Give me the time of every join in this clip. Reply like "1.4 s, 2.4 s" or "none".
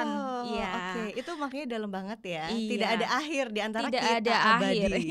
none